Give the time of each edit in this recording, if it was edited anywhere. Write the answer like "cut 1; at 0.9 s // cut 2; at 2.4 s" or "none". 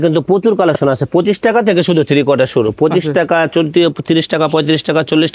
none